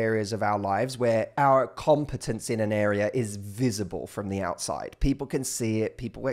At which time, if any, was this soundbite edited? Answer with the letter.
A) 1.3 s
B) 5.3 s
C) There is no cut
A